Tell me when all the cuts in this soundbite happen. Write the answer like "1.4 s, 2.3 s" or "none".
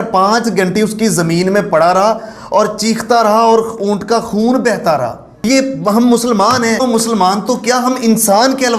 5.3 s, 6.8 s